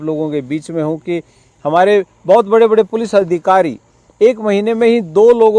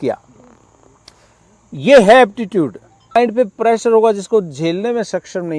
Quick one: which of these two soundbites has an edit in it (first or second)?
second